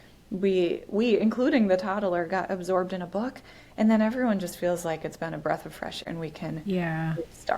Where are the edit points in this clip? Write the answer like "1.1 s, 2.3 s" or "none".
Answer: 6.0 s